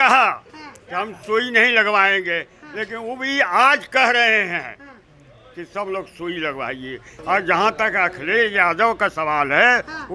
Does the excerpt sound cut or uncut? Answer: cut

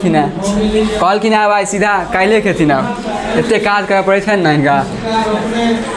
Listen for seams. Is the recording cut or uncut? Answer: uncut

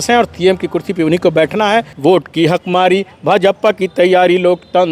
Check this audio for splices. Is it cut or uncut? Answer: cut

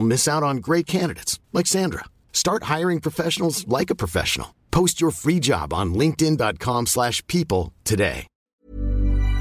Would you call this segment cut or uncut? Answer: cut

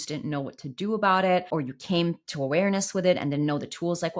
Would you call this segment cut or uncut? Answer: cut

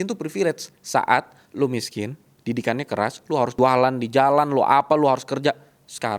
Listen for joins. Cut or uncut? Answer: cut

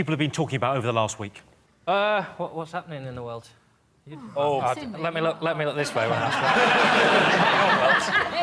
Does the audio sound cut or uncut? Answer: uncut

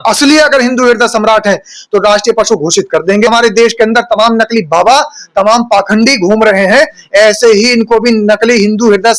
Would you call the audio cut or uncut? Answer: cut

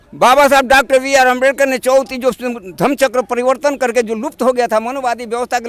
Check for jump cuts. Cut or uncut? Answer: uncut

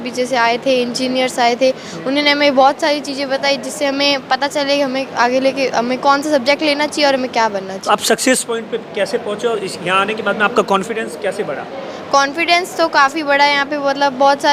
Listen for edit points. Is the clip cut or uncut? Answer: uncut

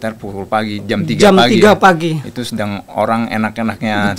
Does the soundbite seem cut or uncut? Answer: uncut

